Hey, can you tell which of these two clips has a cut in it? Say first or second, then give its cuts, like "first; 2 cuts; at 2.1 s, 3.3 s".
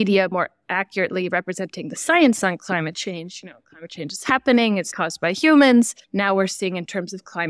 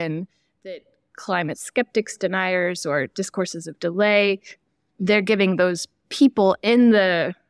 first; 2 cuts; at 5.0 s, 6.0 s